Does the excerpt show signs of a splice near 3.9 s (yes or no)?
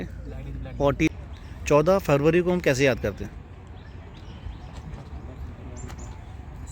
no